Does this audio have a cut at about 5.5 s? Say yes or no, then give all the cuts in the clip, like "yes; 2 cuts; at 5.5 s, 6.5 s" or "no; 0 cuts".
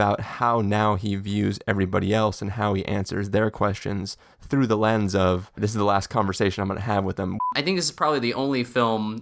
yes; 2 cuts; at 5.5 s, 7.4 s